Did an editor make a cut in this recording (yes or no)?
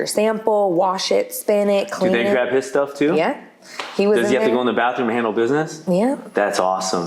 no